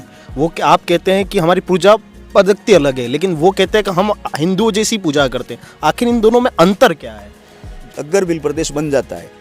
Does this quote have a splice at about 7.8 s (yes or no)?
yes